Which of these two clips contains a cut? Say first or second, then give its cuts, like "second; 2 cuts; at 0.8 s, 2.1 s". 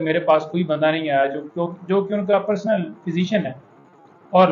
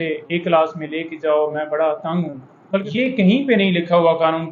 second; 1 cut; at 2.9 s